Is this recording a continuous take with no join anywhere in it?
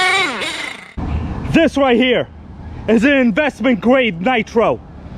no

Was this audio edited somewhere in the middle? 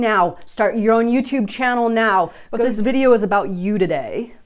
yes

